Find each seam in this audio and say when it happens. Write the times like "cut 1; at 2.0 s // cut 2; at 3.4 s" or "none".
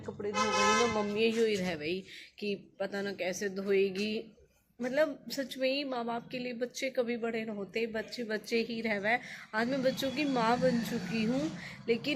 none